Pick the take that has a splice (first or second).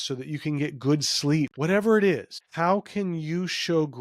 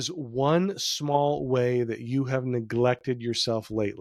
first